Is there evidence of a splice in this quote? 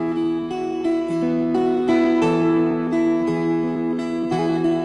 no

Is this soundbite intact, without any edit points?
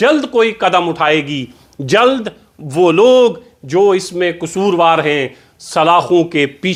yes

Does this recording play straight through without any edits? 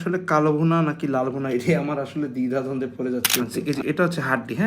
no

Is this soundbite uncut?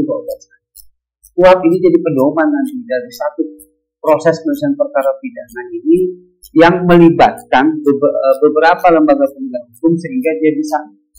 yes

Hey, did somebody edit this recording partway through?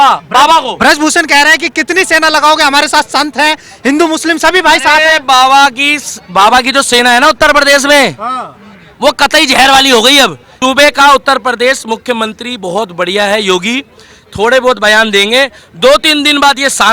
yes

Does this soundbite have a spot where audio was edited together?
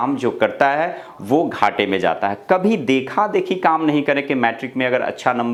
no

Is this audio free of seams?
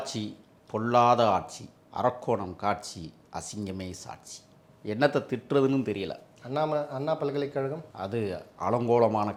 yes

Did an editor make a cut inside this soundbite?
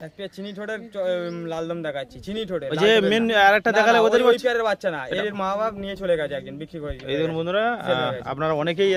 no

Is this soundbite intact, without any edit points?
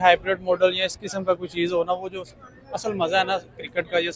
yes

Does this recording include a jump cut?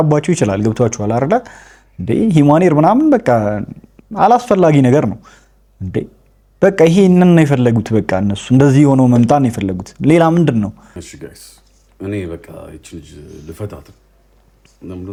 no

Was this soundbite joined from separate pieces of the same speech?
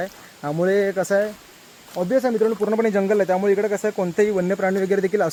no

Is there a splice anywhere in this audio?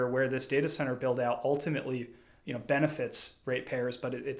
no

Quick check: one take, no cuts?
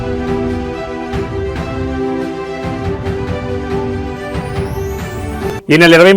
no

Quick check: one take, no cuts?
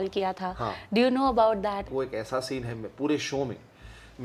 no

